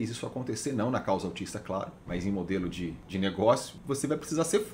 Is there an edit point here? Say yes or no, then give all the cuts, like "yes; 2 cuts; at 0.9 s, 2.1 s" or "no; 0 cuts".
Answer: yes; 2 cuts; at 3.0 s, 3.8 s